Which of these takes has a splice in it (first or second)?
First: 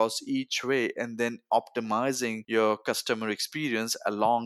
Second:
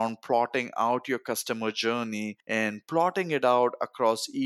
first